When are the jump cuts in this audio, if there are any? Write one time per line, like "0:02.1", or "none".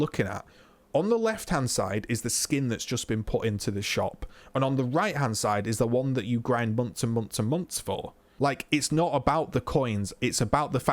0:08.2